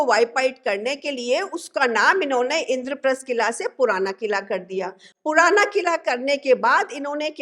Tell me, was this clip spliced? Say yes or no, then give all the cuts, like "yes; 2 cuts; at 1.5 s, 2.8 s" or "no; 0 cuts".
no; 0 cuts